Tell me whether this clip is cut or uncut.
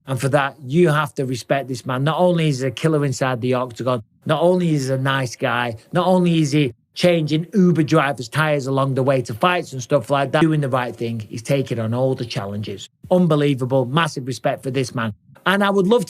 cut